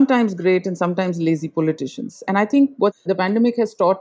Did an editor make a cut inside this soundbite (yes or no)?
yes